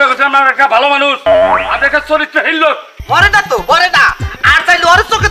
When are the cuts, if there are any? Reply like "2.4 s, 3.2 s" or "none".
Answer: 3.0 s